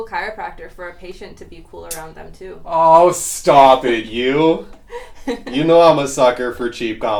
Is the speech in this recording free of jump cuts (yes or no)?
yes